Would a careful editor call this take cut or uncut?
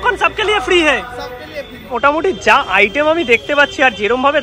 cut